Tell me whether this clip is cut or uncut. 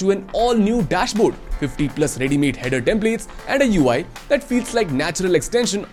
uncut